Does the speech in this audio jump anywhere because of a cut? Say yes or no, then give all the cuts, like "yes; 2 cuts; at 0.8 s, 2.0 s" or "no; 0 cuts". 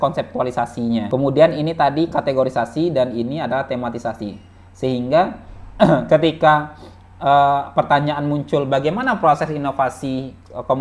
yes; 1 cut; at 1.1 s